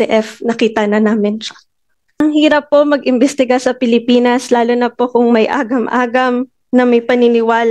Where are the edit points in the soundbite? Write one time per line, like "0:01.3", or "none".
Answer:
0:02.2